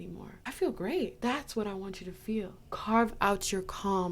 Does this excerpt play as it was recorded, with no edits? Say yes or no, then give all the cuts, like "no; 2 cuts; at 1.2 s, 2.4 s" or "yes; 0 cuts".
no; 1 cut; at 1.1 s